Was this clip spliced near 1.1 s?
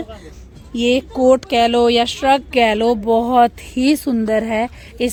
no; 0 cuts

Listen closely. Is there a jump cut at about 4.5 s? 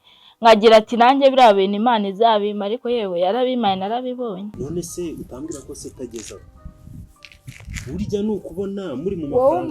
yes; 1 cut; at 4.5 s

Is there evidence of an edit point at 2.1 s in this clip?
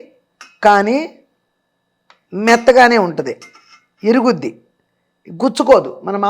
no; 0 cuts

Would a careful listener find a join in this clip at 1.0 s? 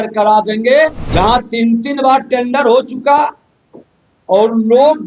yes; 1 cut; at 1.0 s

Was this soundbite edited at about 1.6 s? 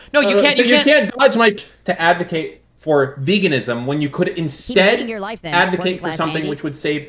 yes; 1 cut; at 1.6 s

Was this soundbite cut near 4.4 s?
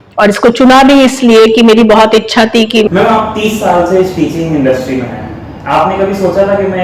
no; 1 cut; at 2.9 s

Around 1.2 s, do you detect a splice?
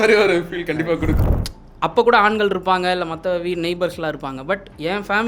yes; 1 cut; at 1.2 s

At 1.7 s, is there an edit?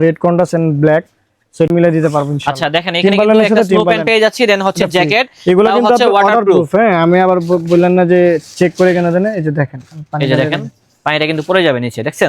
yes; 1 cut; at 1.7 s

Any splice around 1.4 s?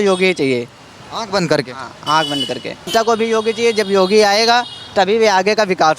no; 1 cut; at 2.9 s

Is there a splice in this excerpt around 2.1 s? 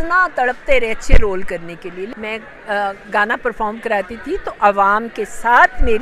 yes; 1 cut; at 2.1 s

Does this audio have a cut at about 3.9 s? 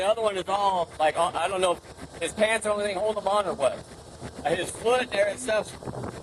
yes; 1 cut; at 3.9 s

